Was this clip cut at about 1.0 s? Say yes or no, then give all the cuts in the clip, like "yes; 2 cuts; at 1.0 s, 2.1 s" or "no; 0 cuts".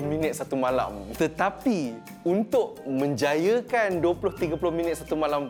no; 0 cuts